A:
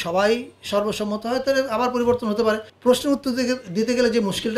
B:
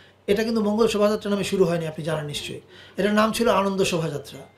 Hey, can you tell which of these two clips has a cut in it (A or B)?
A